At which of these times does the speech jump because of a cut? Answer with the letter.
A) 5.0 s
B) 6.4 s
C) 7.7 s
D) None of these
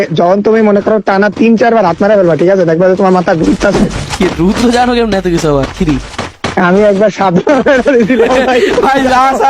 D